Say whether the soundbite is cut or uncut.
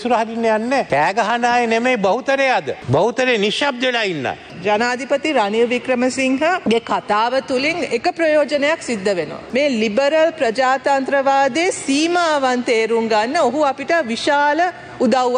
cut